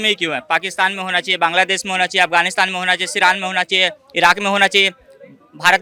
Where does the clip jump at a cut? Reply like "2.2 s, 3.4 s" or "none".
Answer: none